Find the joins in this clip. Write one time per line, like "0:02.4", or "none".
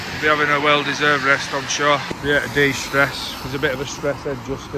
0:02.1

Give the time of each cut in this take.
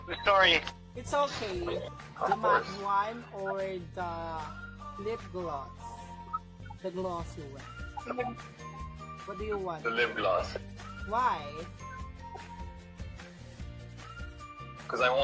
0:02.0

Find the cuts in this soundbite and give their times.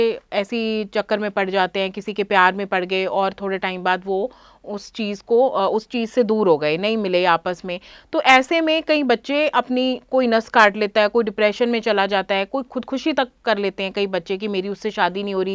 none

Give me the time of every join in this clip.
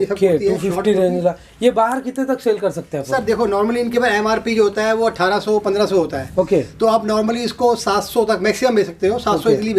none

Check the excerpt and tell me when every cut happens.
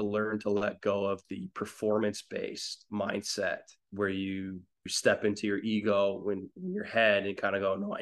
0:02.9
0:03.8
0:04.9

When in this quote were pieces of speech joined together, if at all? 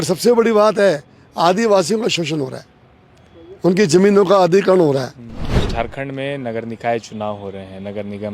0:05.4

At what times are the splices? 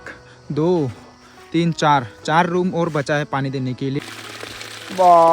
0:04.0

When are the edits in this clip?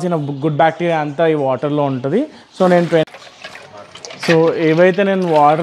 0:03.1

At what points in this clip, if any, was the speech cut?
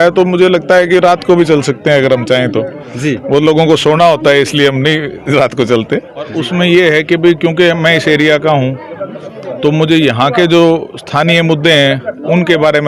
0:06.2

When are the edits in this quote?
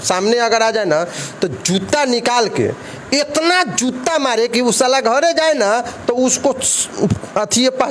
none

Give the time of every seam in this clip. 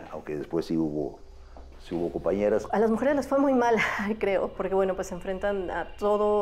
0:02.7
0:04.6

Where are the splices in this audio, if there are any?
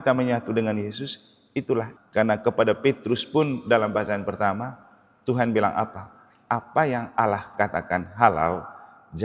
0:01.9

